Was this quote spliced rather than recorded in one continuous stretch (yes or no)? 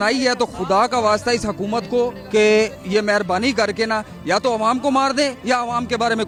no